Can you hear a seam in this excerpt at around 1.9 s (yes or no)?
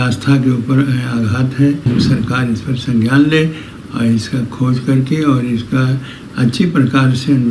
yes